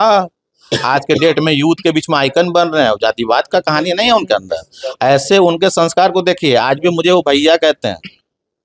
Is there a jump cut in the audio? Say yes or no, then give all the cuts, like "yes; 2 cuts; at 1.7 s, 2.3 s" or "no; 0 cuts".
no; 0 cuts